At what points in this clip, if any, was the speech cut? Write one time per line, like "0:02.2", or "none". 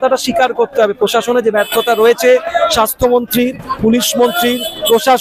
none